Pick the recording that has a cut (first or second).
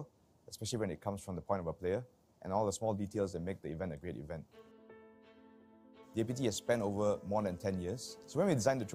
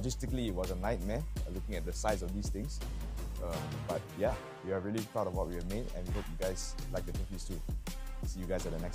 first